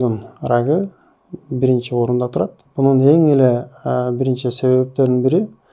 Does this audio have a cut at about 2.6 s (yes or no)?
yes